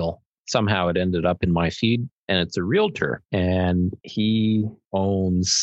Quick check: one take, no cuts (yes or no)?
no